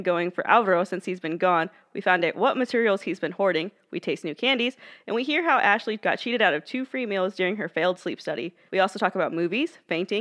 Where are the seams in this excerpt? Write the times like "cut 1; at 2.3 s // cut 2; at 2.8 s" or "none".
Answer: cut 1; at 6.0 s // cut 2; at 8.6 s